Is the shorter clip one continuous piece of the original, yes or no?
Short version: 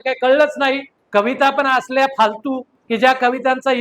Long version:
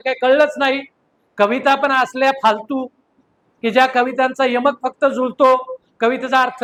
no